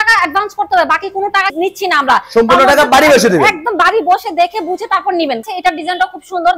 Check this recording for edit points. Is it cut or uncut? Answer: cut